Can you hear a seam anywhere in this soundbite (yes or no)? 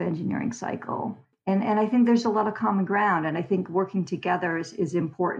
no